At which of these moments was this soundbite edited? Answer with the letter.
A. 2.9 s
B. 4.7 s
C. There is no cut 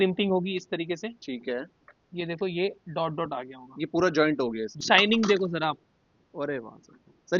B